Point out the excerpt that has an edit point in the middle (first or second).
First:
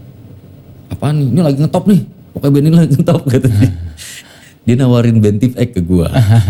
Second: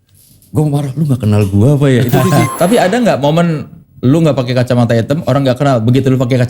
second